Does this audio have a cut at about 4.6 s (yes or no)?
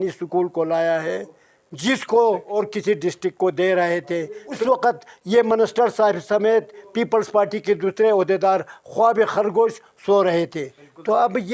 yes